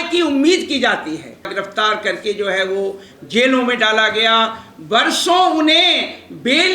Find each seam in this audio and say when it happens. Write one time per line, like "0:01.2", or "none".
0:01.5